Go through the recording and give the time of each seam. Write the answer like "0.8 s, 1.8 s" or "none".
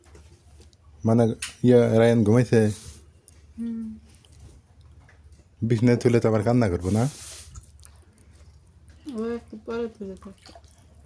none